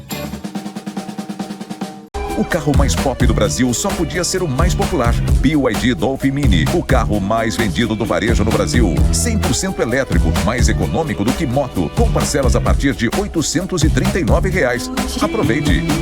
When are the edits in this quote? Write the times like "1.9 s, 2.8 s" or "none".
2.0 s